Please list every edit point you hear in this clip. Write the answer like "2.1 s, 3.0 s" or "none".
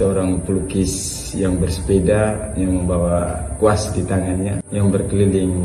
4.6 s